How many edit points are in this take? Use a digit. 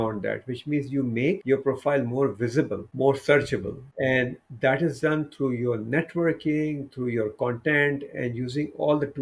3